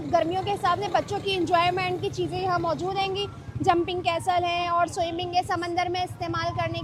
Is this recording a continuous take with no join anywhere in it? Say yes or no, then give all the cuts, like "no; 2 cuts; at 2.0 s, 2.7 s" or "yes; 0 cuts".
yes; 0 cuts